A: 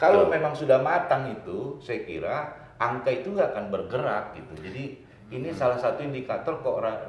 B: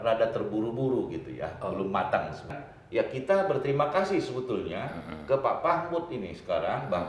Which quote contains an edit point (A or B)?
B